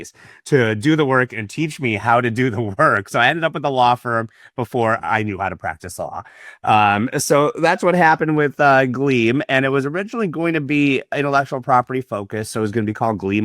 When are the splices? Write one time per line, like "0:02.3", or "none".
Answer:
none